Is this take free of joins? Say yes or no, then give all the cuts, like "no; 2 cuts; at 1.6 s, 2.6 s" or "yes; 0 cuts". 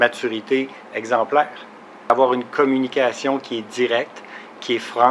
no; 1 cut; at 2.1 s